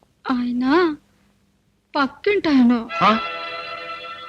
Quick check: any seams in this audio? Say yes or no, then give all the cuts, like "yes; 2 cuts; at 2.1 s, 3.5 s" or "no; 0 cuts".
no; 0 cuts